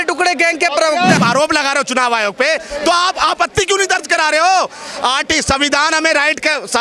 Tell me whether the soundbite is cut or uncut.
cut